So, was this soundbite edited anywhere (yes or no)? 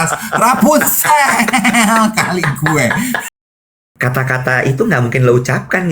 yes